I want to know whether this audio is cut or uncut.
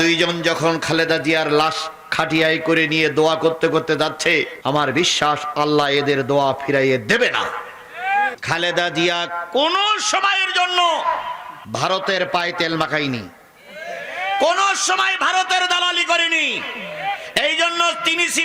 cut